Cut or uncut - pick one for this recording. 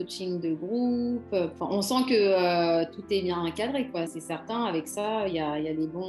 cut